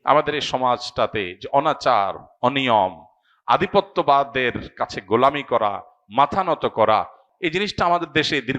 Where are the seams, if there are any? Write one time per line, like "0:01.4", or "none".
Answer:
0:07.2